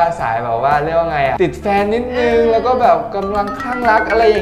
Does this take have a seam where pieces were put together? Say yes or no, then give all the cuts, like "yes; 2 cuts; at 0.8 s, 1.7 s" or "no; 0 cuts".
yes; 1 cut; at 1.3 s